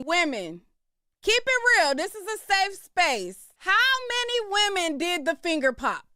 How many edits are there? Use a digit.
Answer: 1